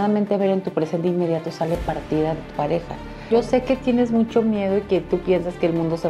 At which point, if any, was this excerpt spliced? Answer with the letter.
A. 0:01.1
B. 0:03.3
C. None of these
B